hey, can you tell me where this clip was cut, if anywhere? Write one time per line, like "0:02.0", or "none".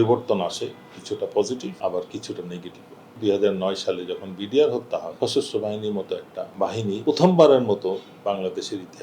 0:01.8
0:03.2
0:05.1
0:06.8